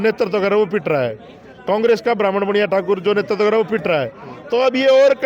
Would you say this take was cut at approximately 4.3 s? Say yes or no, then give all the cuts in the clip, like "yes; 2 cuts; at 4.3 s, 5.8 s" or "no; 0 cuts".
no; 0 cuts